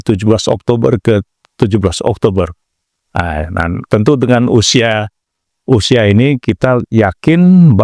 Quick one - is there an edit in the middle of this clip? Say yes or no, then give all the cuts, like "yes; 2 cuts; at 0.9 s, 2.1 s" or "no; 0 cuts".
no; 0 cuts